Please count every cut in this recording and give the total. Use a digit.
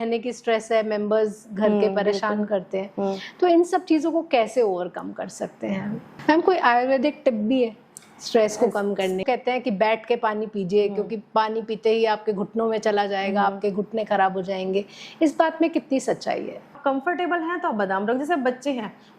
3